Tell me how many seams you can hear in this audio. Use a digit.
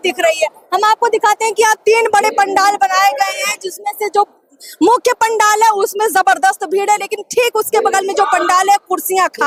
0